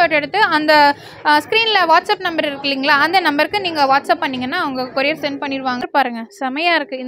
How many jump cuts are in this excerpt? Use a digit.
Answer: 1